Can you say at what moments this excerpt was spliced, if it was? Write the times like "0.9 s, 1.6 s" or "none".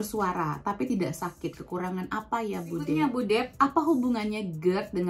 2.9 s